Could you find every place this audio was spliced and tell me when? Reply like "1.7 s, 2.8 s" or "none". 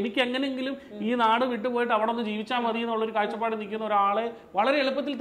none

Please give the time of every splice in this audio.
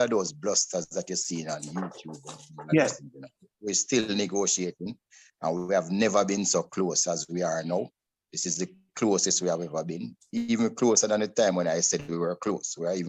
none

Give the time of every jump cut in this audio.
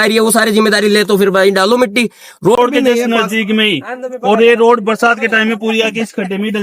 2.6 s

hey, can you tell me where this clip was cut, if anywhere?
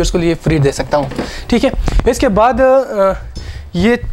none

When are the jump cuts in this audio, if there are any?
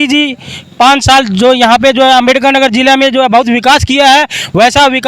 none

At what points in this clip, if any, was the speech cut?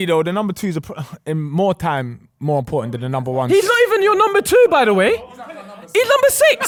none

